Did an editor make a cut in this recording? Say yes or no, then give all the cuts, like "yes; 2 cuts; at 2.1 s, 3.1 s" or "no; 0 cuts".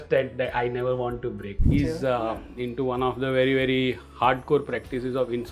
yes; 1 cut; at 1.7 s